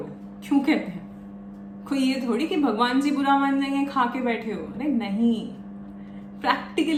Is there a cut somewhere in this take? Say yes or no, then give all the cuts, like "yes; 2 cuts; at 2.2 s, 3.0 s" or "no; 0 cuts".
no; 0 cuts